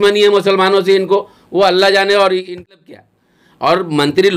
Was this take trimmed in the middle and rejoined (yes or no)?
yes